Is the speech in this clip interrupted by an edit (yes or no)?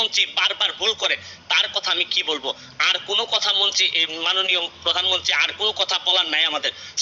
no